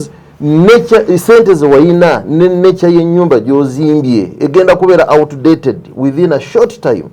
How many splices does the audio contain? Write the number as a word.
zero